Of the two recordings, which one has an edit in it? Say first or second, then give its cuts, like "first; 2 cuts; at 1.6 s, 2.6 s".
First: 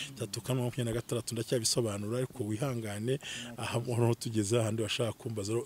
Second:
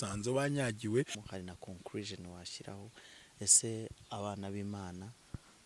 second; 1 cut; at 1.2 s